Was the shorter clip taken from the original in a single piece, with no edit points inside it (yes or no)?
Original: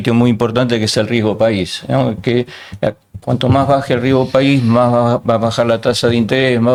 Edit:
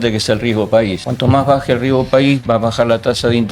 no